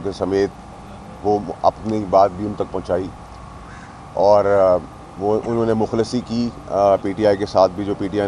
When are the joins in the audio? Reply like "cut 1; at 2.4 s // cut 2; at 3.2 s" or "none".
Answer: none